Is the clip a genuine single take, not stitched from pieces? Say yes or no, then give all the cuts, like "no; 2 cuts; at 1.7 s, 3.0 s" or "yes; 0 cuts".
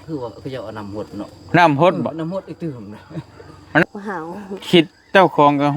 no; 1 cut; at 3.8 s